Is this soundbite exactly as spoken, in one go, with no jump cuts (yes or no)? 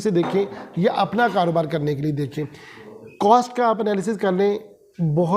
yes